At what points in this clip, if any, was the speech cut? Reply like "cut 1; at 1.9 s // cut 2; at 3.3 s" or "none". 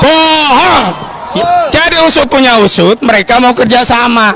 cut 1; at 1.2 s

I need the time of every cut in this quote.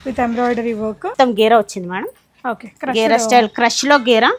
cut 1; at 1.1 s

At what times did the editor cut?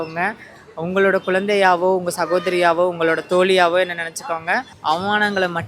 cut 1; at 4.7 s

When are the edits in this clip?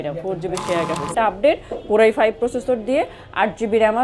cut 1; at 1.1 s

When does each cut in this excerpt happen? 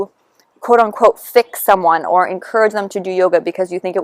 none

